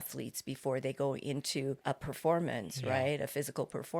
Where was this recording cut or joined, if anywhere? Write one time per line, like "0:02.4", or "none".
0:01.8